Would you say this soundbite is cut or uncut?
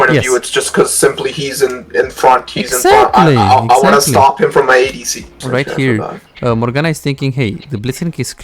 cut